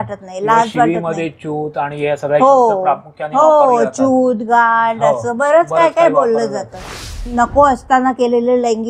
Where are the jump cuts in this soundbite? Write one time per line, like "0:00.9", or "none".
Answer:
0:07.3